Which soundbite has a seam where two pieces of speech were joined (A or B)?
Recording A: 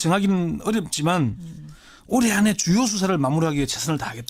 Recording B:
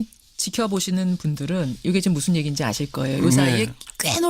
B